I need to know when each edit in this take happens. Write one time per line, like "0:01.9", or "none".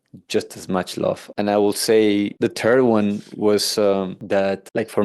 none